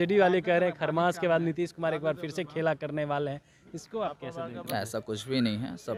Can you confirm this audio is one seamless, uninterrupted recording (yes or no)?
yes